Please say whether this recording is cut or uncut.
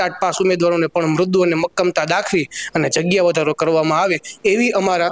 uncut